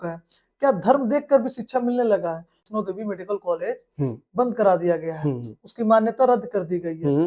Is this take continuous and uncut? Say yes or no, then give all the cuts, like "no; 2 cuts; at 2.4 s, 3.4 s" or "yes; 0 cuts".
no; 1 cut; at 2.6 s